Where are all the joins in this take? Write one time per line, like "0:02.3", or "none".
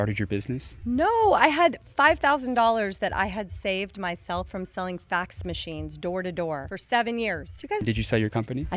0:07.8